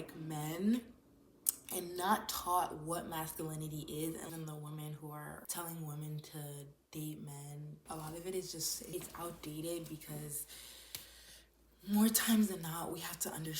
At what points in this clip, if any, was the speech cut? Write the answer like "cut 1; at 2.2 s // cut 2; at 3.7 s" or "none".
cut 1; at 4.3 s // cut 2; at 5.4 s // cut 3; at 7.8 s // cut 4; at 8.9 s

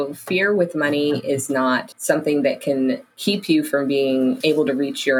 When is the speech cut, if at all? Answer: cut 1; at 1.9 s // cut 2; at 3.1 s // cut 3; at 4.4 s

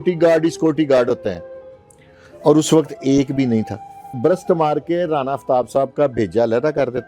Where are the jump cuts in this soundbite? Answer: cut 1; at 4.2 s

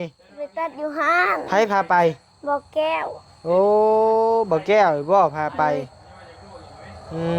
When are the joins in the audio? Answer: none

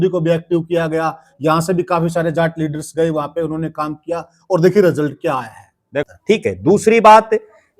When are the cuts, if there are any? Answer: cut 1; at 6.0 s

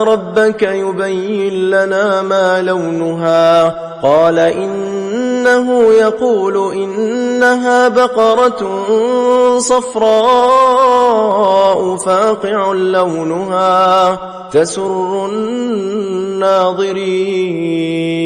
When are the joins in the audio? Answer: none

